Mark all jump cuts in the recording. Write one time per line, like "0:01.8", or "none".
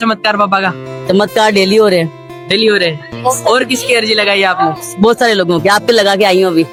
none